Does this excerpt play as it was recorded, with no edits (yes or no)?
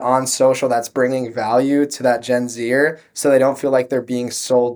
yes